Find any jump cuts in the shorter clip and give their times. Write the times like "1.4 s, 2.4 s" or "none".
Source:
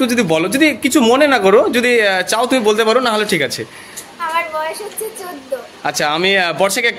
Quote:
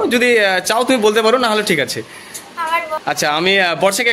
3.0 s